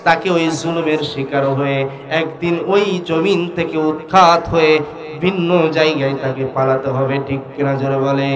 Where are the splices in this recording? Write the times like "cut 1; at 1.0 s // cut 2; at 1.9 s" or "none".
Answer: none